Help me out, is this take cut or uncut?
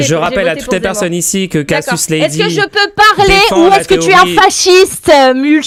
uncut